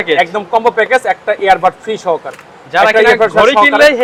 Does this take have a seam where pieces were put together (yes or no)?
no